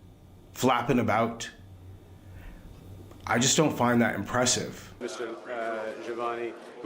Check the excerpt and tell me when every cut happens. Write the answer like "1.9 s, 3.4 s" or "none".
5.0 s